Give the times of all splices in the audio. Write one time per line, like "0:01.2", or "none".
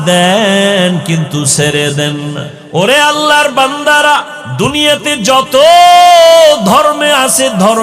0:02.5
0:04.4